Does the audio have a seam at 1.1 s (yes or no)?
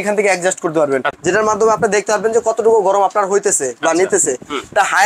yes